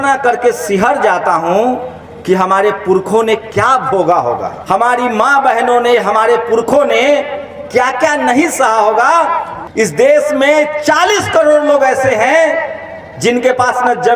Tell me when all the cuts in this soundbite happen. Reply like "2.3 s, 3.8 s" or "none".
4.5 s, 9.5 s